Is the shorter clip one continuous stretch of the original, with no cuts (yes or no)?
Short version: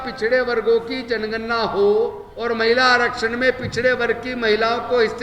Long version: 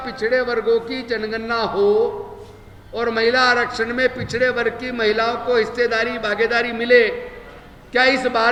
no